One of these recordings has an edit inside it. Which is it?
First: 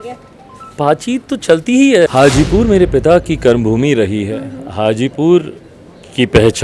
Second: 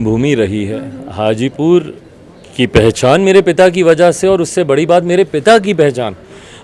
first; 1 cut; at 2.1 s

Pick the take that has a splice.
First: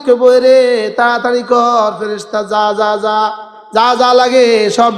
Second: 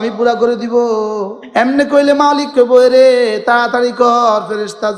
second; 1 cut; at 1.4 s

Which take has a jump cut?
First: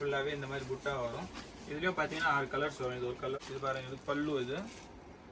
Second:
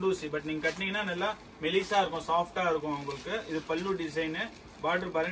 first; 1 cut; at 3.4 s

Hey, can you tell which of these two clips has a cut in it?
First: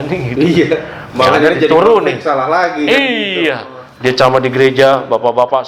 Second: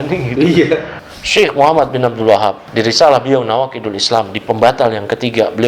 second; 2 cuts; at 1.0 s, 2.7 s

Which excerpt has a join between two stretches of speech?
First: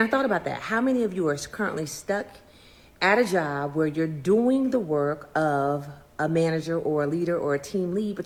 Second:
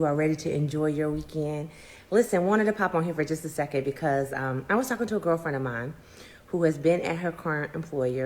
second; 1 cut; at 2.2 s

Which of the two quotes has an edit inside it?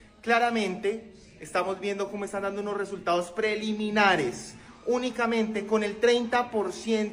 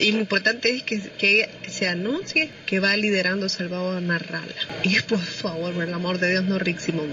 second; 1 cut; at 2.6 s

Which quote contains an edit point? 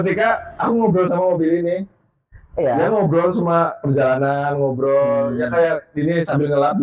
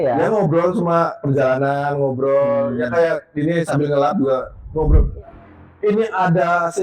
second; 1 cut; at 5.2 s

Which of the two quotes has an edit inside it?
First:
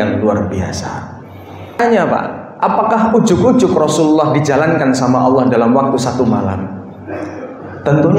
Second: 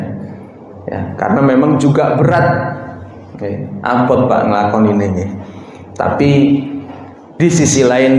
first; 1 cut; at 1.8 s

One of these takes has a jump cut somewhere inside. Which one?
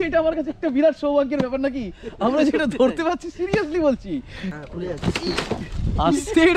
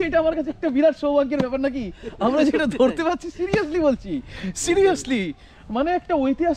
first; 1 cut; at 4.5 s

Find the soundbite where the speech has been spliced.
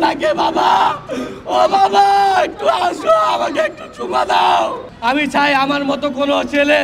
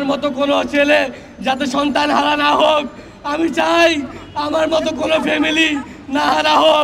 first; 1 cut; at 4.9 s

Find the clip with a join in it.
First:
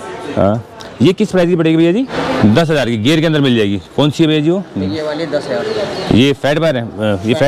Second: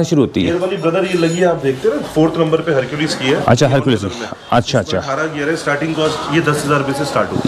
first; 1 cut; at 2.2 s

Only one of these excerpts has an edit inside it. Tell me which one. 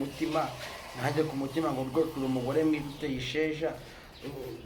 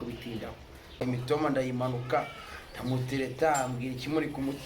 second; 1 cut; at 1.0 s

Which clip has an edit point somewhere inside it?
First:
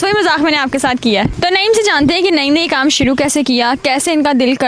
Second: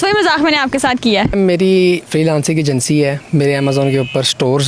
second; 1 cut; at 1.3 s

